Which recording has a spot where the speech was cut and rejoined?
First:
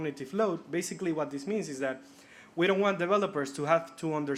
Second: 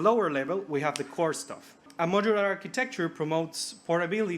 second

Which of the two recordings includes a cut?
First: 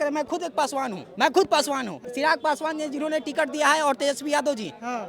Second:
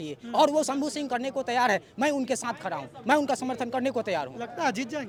first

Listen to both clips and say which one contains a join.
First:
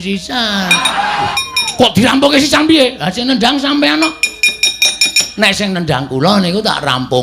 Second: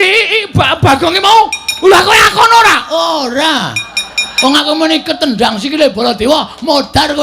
first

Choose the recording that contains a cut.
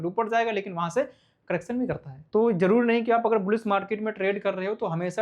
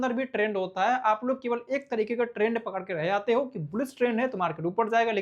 first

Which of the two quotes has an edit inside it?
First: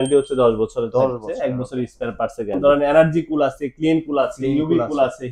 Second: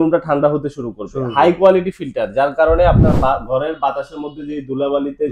first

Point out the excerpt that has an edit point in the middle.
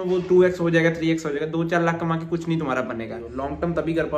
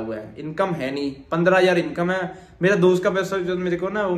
first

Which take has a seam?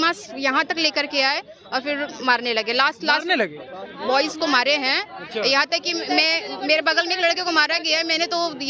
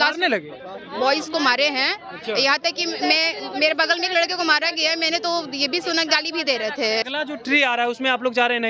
second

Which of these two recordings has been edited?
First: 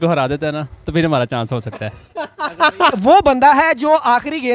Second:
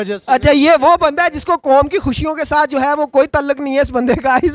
first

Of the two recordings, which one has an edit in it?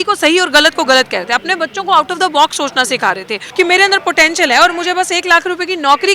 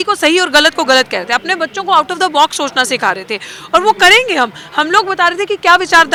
first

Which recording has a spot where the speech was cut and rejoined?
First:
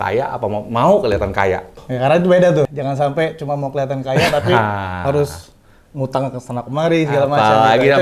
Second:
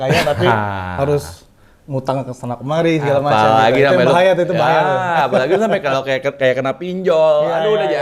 first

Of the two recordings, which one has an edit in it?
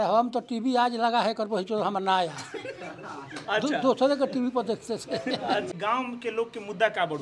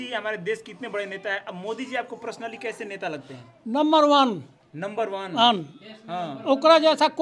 first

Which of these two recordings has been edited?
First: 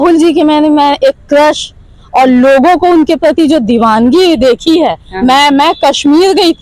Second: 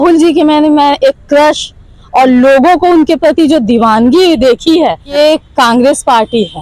second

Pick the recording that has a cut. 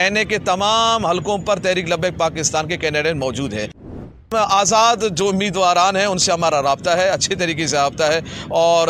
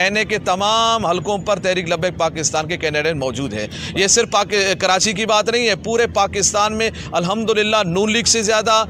first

